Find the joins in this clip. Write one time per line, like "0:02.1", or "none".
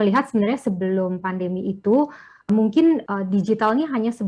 0:02.5
0:03.1